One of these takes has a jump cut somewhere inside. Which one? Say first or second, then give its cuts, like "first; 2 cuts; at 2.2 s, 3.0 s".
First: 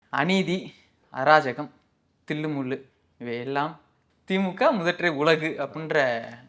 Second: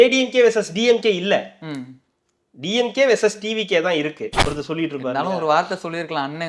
second; 1 cut; at 4.3 s